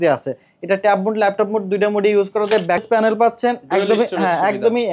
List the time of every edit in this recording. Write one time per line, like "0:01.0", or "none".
0:03.0